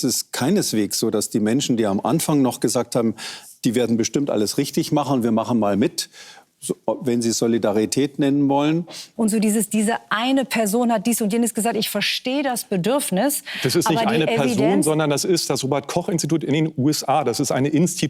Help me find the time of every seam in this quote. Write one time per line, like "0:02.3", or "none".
0:09.0